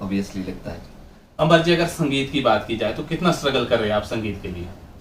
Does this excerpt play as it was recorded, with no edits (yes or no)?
yes